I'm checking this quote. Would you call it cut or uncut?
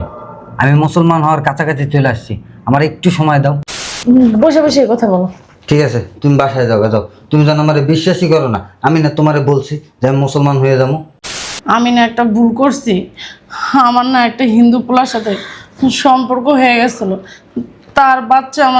cut